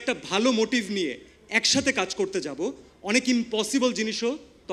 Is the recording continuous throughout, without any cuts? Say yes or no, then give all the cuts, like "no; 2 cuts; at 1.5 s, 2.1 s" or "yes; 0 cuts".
yes; 0 cuts